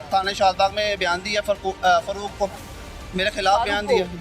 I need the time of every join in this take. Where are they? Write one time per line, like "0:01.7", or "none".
none